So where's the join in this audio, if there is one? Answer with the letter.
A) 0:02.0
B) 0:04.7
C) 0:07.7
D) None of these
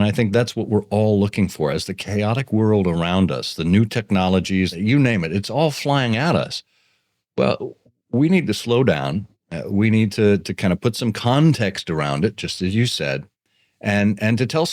B